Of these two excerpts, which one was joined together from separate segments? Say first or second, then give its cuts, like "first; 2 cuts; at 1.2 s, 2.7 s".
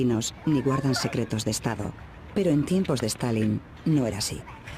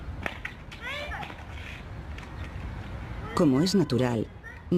second; 1 cut; at 2.1 s